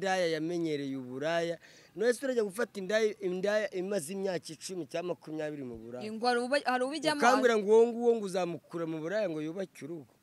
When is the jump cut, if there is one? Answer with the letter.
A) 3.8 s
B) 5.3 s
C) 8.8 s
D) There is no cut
D